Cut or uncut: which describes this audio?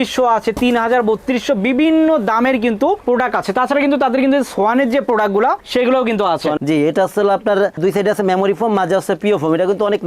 cut